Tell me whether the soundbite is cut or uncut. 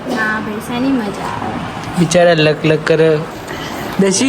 cut